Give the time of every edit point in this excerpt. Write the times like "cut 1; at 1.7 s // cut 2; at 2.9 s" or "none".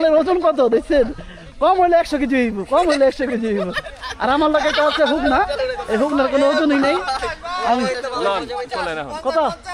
none

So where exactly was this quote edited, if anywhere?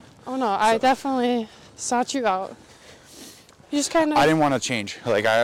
cut 1; at 2.6 s

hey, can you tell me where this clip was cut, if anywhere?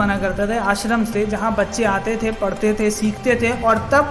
none

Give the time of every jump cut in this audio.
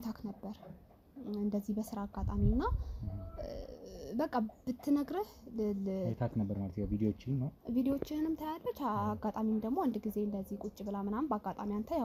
none

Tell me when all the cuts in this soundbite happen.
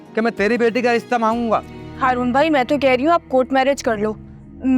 cut 1; at 1.8 s

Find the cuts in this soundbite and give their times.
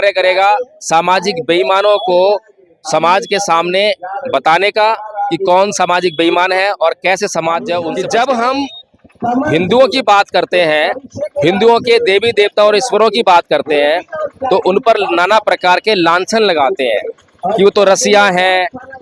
cut 1; at 7.9 s

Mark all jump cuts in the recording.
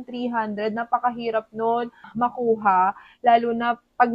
cut 1; at 2.1 s

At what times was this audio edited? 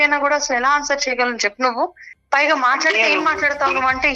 none

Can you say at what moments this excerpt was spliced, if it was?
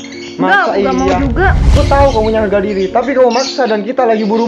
cut 1; at 1.6 s

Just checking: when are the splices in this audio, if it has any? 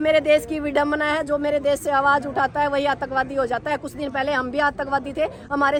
none

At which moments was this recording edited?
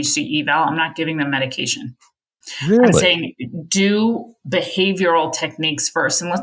none

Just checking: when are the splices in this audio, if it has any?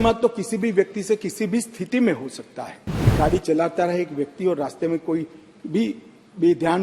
cut 1; at 3.1 s

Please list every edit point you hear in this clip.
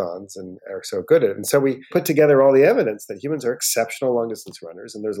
cut 1; at 1.9 s

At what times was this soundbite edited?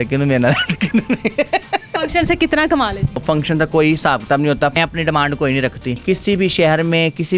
cut 1; at 2.0 s // cut 2; at 3.2 s // cut 3; at 4.7 s // cut 4; at 5.9 s

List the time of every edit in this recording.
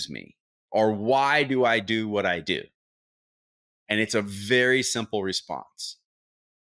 none

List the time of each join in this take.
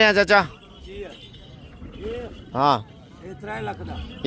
none

